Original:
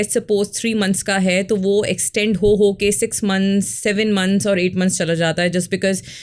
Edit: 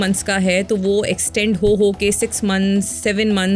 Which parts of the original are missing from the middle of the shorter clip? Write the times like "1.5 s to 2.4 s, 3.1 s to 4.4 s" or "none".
none